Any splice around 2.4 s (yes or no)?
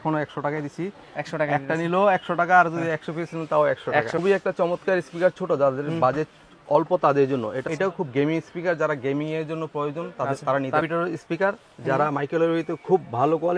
no